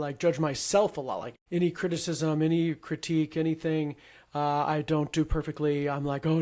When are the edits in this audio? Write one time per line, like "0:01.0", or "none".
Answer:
0:01.3